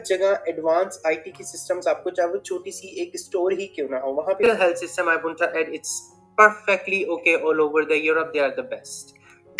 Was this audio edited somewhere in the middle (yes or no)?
yes